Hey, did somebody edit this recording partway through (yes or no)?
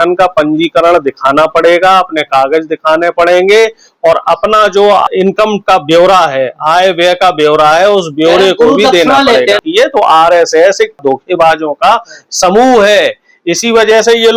yes